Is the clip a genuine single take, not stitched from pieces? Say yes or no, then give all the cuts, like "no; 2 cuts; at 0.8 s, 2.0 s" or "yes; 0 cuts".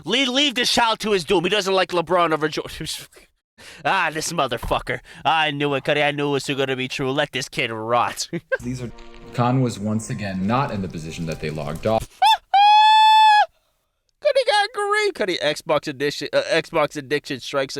no; 1 cut; at 9.0 s